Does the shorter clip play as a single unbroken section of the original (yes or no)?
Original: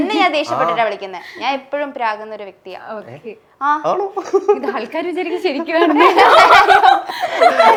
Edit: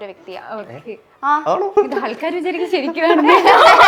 no